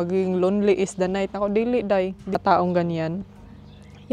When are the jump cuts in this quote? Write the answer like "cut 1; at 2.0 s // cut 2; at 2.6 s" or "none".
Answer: cut 1; at 2.3 s